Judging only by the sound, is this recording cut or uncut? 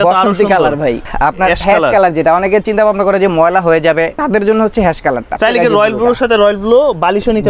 cut